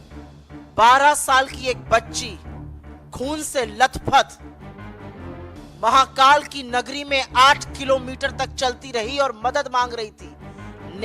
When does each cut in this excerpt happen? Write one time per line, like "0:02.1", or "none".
0:00.7
0:04.2
0:05.8